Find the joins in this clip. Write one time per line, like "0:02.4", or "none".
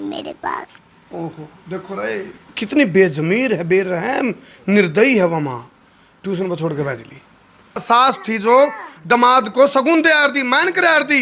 0:07.8